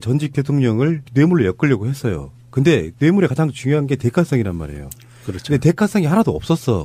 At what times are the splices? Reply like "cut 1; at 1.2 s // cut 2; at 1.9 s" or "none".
cut 1; at 1.7 s